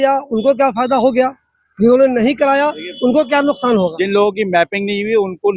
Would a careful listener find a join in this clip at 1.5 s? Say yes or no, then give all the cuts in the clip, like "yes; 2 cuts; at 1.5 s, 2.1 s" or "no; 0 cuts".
no; 1 cut; at 4.0 s